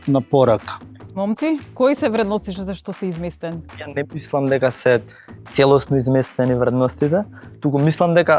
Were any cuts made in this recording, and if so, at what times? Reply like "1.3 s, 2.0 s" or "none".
1.1 s, 3.8 s